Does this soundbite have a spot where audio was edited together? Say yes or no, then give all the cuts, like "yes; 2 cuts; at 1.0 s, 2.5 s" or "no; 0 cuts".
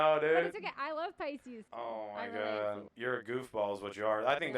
yes; 2 cuts; at 1.6 s, 2.9 s